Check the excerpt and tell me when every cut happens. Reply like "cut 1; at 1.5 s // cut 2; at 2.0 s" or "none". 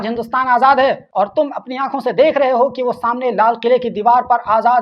cut 1; at 1.0 s